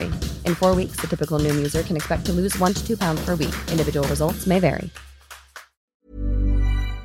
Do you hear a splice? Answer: yes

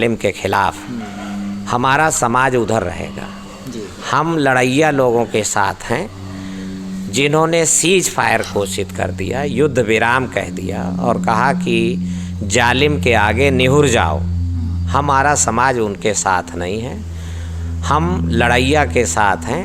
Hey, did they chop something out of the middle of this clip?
no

